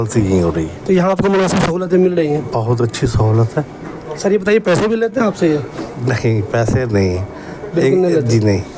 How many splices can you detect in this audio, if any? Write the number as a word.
zero